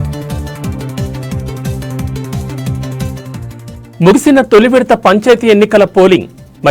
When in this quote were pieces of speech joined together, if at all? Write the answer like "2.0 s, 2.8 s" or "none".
3.5 s